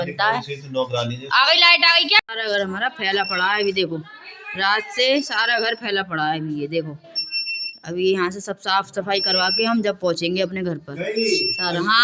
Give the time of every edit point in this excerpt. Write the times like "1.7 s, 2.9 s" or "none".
none